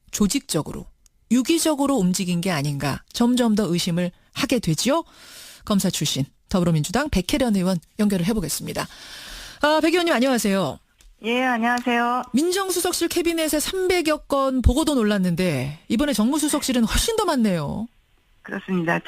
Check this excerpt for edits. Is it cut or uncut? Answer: uncut